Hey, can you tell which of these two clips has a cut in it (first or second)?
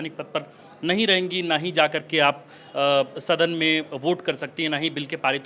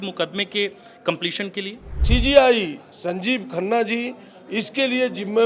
second